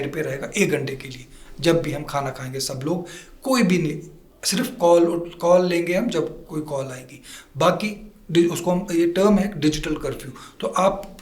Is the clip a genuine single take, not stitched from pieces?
yes; 0 cuts

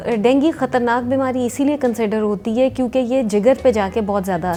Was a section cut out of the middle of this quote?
no; 0 cuts

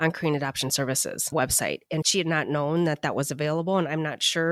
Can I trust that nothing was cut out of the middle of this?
yes; 0 cuts

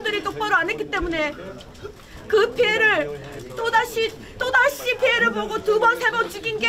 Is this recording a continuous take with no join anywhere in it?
yes; 0 cuts

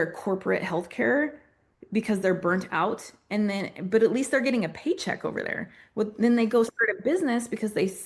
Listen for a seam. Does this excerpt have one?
no; 0 cuts

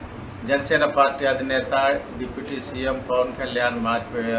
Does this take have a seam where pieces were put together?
no; 0 cuts

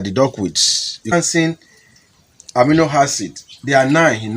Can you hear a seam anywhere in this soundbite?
yes; 1 cut; at 1.1 s

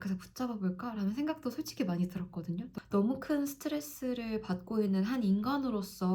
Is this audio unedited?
no; 1 cut; at 2.7 s

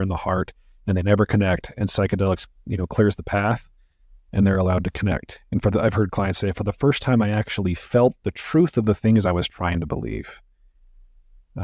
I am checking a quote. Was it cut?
no; 0 cuts

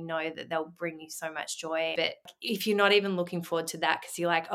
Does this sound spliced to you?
yes; 1 cut; at 2.3 s

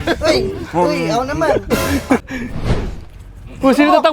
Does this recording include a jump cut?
yes; 1 cut; at 2.2 s

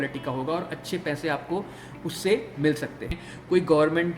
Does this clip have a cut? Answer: yes; 1 cut; at 3.3 s

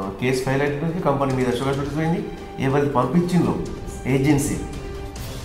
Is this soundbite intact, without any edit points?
yes; 0 cuts

